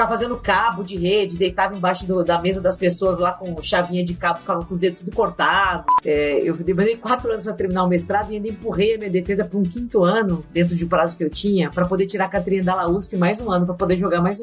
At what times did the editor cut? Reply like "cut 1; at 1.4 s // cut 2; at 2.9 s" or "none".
cut 1; at 5.9 s